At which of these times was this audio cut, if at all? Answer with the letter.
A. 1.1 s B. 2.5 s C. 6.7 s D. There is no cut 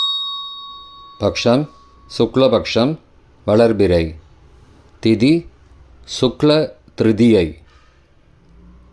A